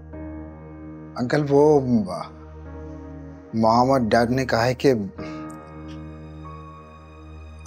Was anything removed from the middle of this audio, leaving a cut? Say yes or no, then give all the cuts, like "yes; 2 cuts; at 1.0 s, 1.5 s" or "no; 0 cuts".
no; 0 cuts